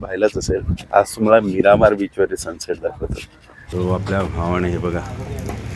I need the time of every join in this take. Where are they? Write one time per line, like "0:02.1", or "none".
0:03.6